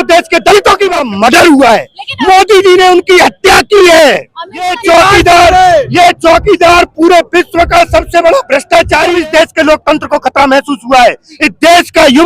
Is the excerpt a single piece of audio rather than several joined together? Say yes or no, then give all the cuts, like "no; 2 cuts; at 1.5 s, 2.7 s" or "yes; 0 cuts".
no; 3 cuts; at 1.0 s, 4.8 s, 9.1 s